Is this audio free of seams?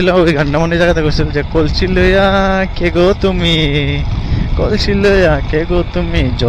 yes; 0 cuts

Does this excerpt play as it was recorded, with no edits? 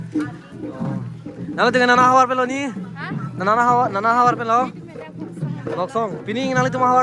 yes; 0 cuts

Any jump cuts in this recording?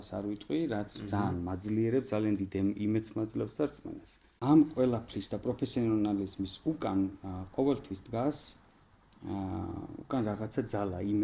yes; 1 cut; at 4.2 s

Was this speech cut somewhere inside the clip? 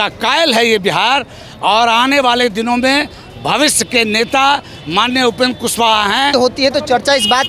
yes; 1 cut; at 6.3 s

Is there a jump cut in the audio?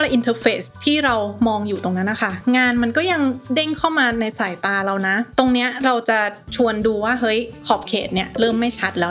no; 0 cuts

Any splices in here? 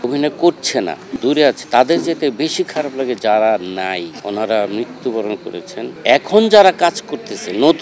yes; 1 cut; at 5.9 s

